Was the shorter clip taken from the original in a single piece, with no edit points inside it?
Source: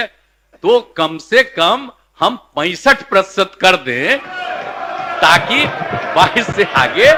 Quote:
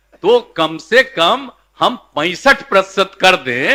yes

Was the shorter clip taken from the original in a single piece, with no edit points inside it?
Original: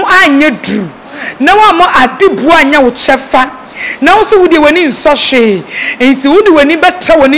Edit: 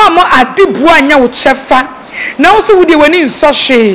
yes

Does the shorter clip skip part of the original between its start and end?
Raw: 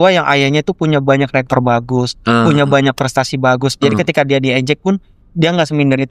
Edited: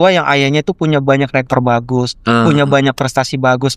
no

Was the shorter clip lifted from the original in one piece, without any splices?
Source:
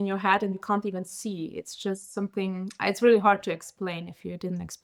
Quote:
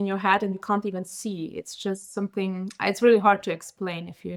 yes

